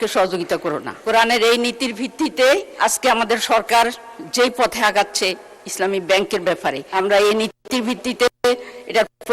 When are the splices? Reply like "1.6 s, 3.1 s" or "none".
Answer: 1.0 s, 2.7 s, 6.8 s

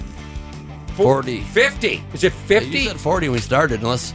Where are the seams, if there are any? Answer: 0.9 s

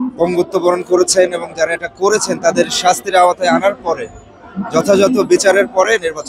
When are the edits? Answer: none

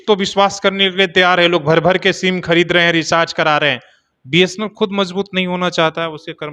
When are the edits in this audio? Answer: none

